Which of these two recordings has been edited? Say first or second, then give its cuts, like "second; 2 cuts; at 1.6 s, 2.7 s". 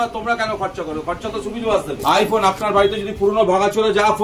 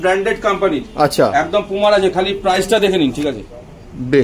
first; 1 cut; at 2.0 s